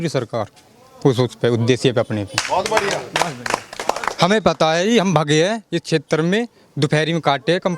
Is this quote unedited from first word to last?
yes; 0 cuts

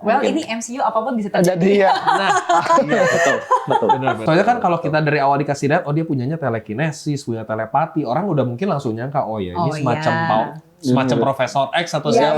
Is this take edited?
yes; 1 cut; at 4.2 s

